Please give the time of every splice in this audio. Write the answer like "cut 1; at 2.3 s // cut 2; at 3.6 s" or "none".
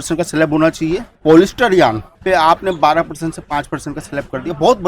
cut 1; at 1.1 s // cut 2; at 2.1 s